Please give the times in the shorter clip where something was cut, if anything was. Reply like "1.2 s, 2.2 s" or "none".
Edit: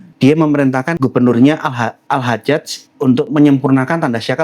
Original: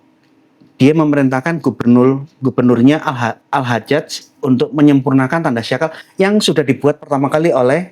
0.9 s